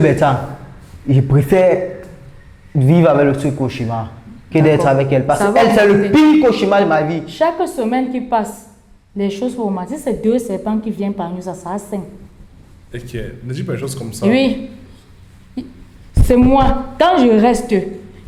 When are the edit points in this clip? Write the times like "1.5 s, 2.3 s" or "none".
none